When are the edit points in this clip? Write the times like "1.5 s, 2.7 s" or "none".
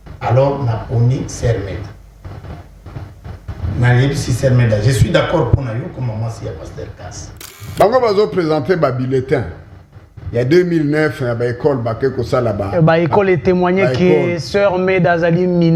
7.6 s

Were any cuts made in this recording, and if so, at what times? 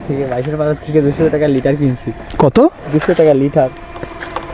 none

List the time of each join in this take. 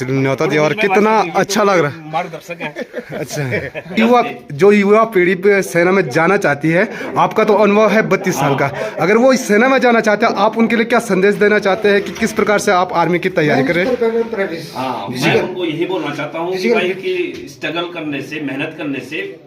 4.0 s

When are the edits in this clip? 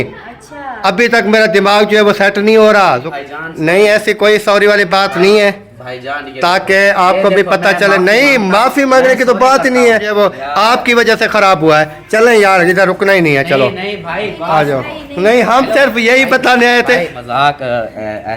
3.1 s, 10.1 s, 17.2 s

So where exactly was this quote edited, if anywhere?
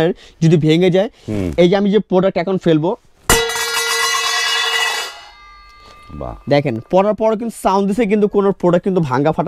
none

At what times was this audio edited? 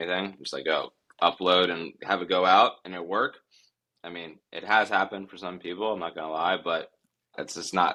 none

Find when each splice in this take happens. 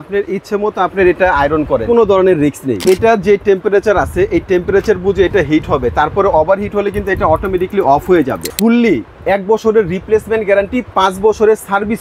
1.8 s, 2.8 s, 8.5 s

